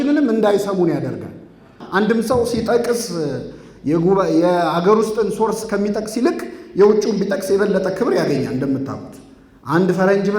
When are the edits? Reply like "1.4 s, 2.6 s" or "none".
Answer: 1.8 s

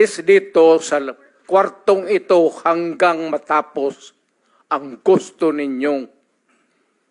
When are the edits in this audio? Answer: none

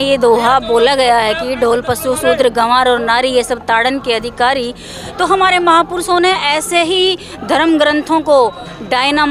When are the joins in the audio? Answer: none

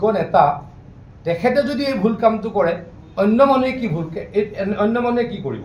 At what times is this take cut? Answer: none

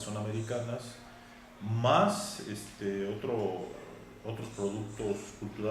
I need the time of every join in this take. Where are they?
3.5 s

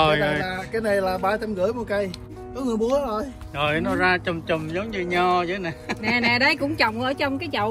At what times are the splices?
2.3 s

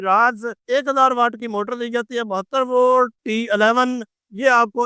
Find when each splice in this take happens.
3.2 s

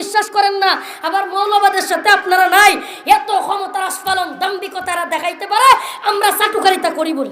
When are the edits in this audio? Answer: none

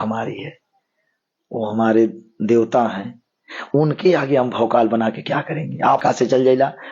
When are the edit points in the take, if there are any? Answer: 6.0 s

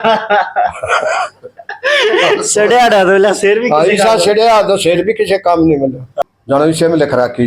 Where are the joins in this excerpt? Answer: 6.2 s

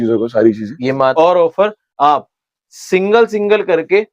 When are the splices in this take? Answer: 1.1 s

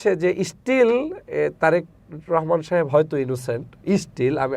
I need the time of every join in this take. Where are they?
none

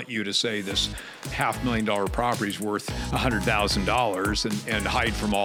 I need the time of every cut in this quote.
none

